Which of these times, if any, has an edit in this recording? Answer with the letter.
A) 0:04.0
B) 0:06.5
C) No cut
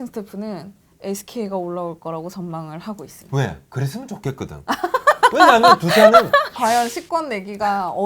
B